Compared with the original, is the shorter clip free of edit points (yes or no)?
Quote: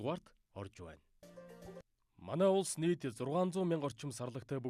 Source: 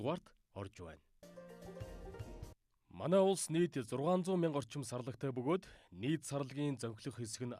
no